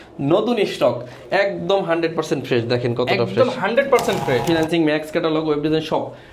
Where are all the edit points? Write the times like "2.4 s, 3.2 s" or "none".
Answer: 4.4 s

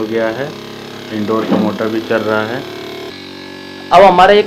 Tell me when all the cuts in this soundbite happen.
3.1 s

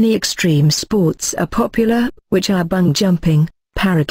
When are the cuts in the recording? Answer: 2.9 s

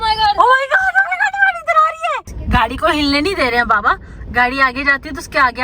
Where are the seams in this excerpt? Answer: 2.3 s

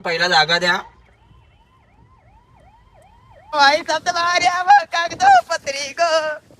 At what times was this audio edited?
3.5 s

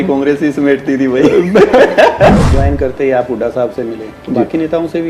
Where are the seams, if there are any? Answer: 2.4 s

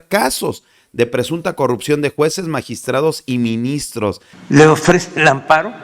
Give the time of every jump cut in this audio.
4.3 s

